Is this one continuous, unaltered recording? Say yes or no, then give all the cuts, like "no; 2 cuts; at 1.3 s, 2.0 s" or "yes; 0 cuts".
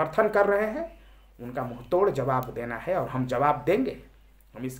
yes; 0 cuts